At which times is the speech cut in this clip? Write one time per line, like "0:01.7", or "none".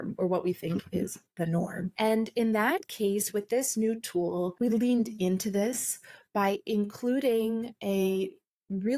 0:01.9
0:04.5